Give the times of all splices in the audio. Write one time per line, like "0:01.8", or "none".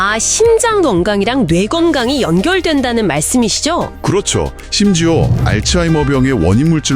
0:04.6